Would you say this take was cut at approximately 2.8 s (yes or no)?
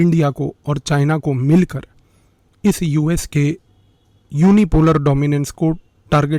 no